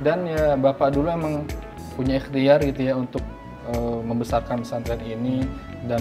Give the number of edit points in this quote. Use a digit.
1